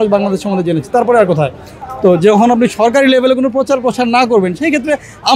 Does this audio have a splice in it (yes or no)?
no